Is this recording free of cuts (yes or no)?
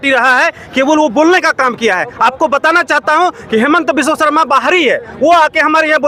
yes